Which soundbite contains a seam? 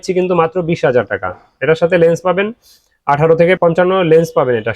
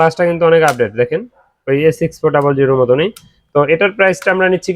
first; 1 cut; at 3.6 s

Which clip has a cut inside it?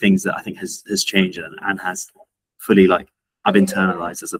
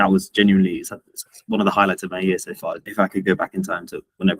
second; 1 cut; at 2.9 s

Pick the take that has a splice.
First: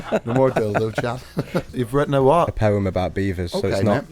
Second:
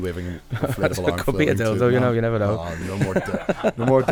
first; 1 cut; at 1.8 s

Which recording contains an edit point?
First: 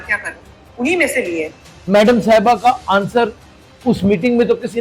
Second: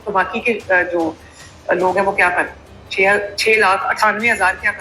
first; 1 cut; at 1.7 s

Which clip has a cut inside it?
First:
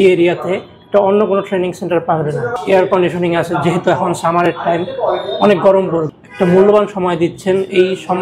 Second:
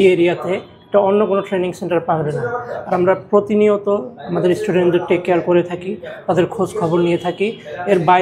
first; 2 cuts; at 2.6 s, 6.2 s

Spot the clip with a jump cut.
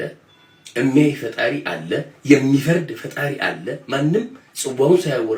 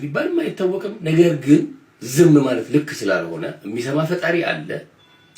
second; 1 cut; at 3.6 s

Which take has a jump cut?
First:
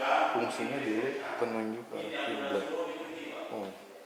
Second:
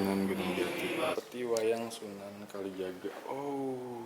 second; 1 cut; at 1.1 s

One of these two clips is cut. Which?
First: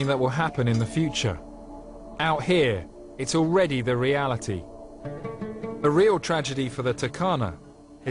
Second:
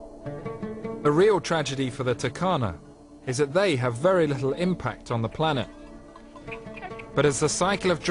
first; 1 cut; at 1.7 s

